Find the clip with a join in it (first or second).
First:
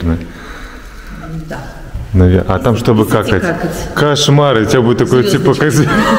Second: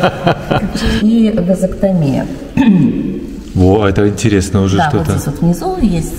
second